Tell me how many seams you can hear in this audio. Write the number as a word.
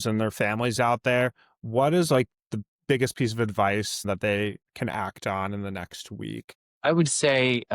two